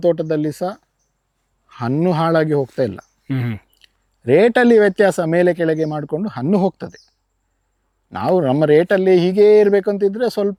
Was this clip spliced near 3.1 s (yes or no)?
no